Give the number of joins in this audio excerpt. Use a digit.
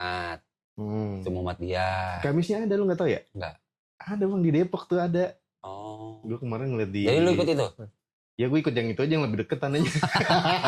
0